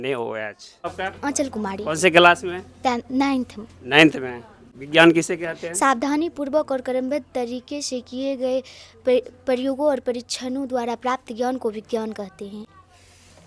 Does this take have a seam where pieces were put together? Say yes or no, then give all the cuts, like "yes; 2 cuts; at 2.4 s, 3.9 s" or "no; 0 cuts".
yes; 1 cut; at 0.9 s